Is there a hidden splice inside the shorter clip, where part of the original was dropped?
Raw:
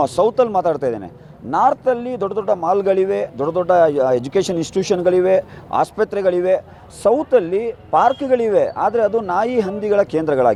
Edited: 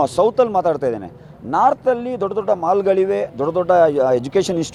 no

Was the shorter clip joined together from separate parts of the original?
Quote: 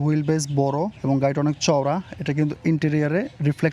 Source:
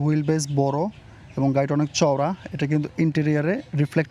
yes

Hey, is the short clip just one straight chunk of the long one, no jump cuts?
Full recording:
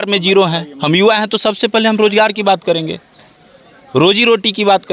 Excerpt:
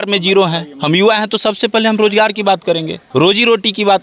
no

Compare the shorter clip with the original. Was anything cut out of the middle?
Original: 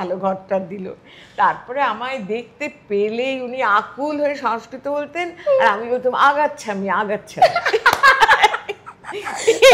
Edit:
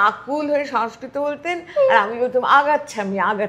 no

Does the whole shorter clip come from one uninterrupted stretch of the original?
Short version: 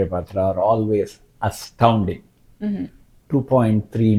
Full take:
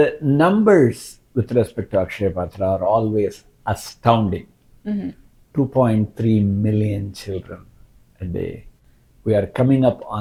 yes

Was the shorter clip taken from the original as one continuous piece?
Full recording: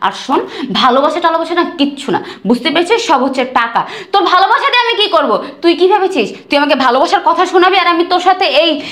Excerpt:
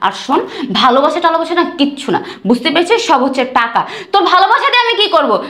yes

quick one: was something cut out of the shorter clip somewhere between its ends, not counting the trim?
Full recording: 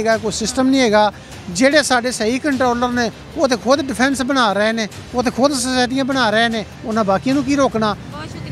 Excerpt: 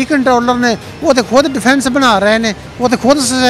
no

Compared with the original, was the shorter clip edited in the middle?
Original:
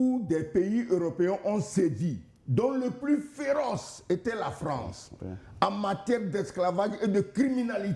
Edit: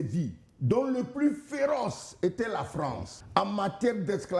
yes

